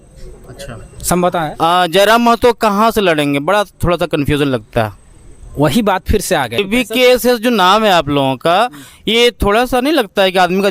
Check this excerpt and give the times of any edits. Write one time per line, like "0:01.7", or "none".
0:06.6